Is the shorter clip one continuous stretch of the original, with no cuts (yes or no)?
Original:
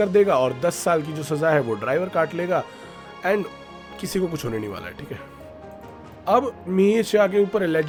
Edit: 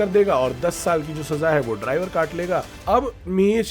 no